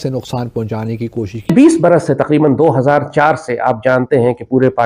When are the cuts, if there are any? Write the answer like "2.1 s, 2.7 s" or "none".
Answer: 1.5 s